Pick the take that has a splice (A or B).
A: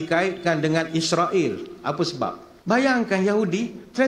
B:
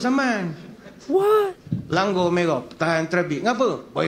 A